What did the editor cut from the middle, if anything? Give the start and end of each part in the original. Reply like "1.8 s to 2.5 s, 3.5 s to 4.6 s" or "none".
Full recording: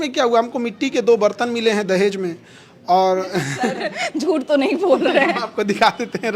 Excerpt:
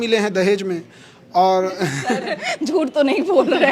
none

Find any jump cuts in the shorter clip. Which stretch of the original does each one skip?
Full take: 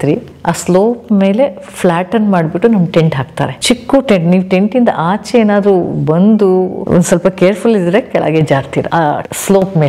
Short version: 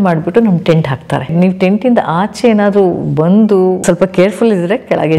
3.6 s to 4.2 s, 6.7 s to 7.1 s

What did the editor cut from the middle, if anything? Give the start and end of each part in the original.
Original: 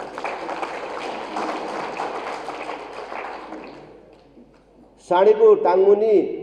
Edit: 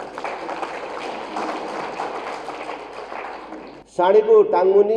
3.8 s to 4.9 s

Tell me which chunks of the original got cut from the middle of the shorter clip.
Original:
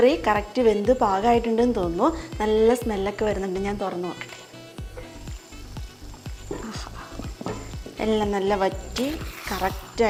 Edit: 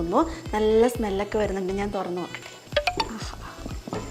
4.5 s to 6.2 s

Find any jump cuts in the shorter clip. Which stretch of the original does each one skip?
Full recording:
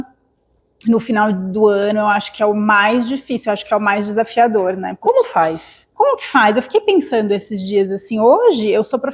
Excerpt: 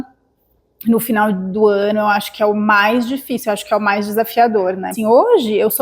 4.9 s to 8.0 s

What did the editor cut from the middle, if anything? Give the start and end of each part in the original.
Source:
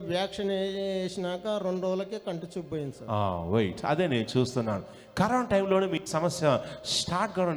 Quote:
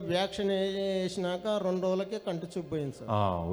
none

